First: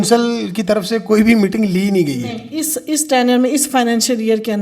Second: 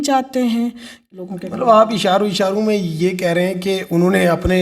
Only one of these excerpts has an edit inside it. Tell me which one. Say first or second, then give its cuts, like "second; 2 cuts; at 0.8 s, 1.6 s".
second; 1 cut; at 1.0 s